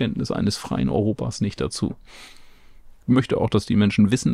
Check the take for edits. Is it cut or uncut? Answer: cut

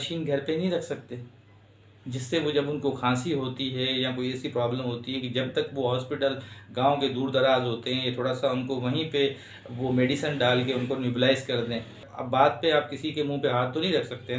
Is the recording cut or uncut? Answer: cut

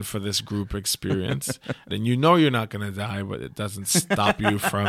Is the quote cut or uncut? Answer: cut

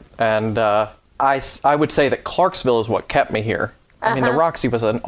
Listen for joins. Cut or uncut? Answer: cut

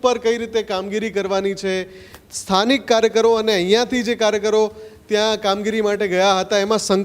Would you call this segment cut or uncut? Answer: uncut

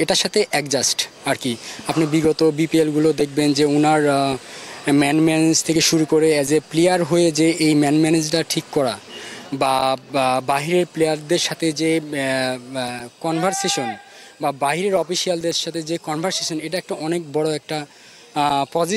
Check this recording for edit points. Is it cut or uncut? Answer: uncut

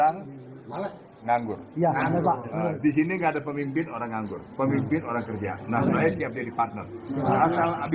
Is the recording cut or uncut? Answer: uncut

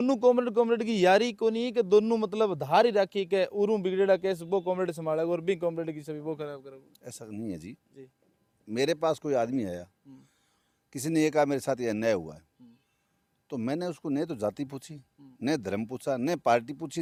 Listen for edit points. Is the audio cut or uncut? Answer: uncut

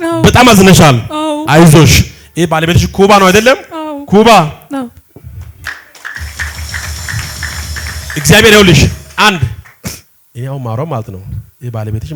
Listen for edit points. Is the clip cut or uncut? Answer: uncut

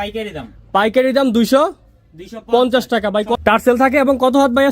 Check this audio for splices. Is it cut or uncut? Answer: cut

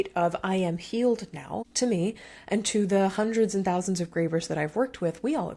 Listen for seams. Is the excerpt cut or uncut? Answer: cut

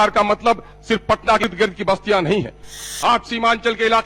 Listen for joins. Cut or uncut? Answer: cut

